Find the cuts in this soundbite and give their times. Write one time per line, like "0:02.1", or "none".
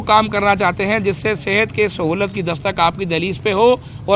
none